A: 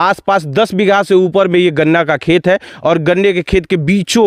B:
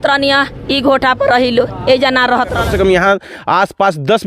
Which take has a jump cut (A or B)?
B